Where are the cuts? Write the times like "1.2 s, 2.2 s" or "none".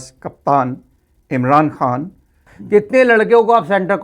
2.5 s